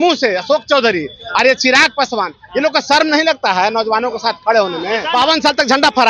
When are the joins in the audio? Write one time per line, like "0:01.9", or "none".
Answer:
0:05.0